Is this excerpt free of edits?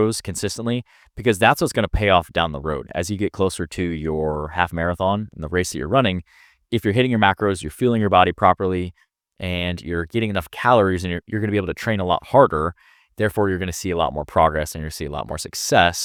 yes; 0 cuts

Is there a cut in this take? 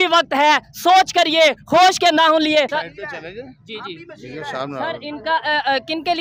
yes; 1 cut; at 2.8 s

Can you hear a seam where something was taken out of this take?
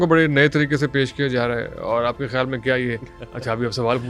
no; 0 cuts

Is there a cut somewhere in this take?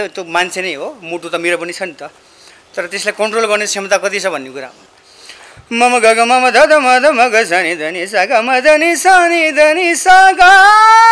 yes; 1 cut; at 4.7 s

